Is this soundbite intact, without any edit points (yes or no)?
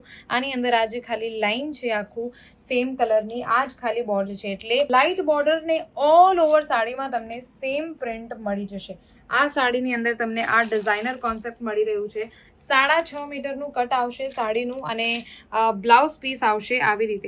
yes